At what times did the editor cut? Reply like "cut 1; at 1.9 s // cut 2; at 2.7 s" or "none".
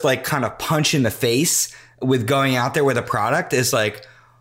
none